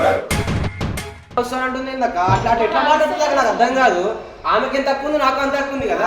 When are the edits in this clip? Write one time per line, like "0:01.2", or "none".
0:01.4